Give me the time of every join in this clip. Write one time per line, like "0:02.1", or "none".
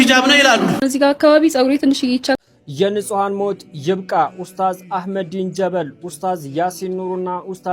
0:02.3